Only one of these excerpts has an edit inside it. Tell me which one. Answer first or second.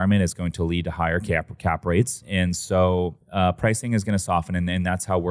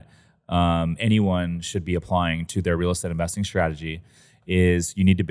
first